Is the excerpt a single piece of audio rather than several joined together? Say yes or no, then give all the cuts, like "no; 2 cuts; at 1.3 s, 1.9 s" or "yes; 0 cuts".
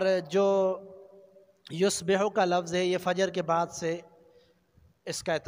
yes; 0 cuts